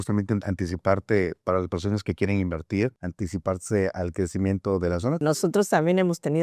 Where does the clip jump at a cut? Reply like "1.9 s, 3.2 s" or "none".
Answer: 3.0 s, 5.2 s